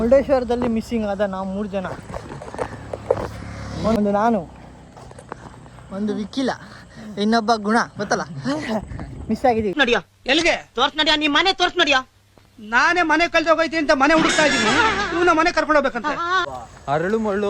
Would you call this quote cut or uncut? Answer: cut